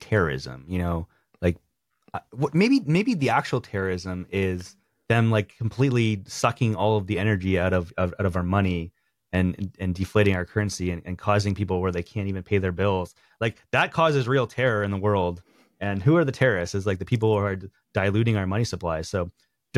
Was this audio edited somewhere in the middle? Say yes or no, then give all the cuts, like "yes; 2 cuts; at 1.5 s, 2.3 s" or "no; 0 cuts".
no; 0 cuts